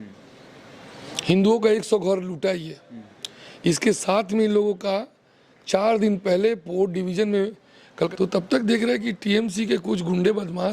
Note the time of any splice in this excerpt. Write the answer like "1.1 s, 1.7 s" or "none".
8.1 s